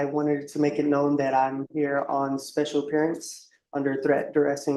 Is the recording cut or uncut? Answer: uncut